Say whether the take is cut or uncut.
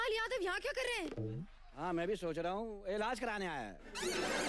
uncut